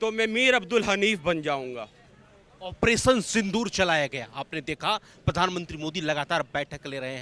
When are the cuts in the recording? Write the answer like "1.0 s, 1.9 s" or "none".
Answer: none